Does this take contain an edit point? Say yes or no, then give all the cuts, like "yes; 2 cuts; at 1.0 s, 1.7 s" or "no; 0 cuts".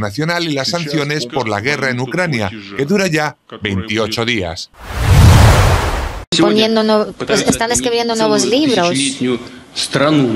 yes; 2 cuts; at 4.6 s, 6.2 s